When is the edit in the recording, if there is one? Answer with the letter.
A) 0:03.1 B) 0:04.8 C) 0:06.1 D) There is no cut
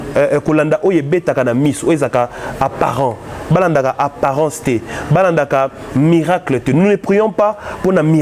D